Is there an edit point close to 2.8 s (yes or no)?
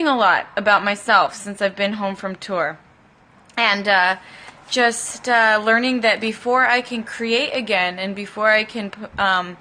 no